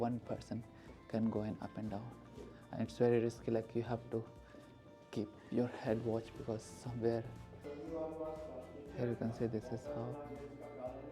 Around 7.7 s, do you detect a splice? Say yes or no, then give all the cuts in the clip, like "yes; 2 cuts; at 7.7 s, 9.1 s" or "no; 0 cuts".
yes; 1 cut; at 7.7 s